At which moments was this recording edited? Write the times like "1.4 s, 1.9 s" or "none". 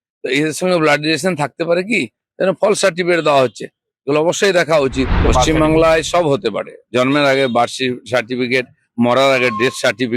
5.2 s